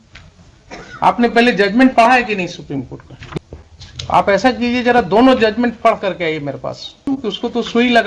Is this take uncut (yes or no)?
no